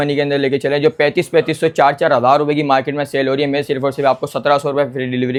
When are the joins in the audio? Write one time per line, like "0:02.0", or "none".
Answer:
none

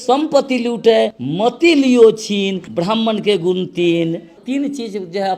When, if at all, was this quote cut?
0:01.2
0:02.6
0:04.4

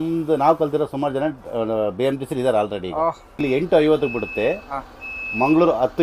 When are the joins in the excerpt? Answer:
0:03.3

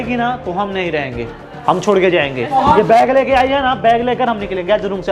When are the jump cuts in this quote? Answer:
none

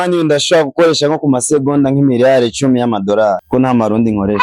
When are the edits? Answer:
0:03.4

